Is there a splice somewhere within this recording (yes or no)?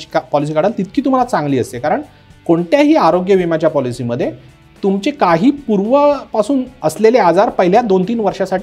no